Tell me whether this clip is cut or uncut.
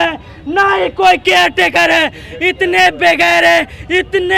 uncut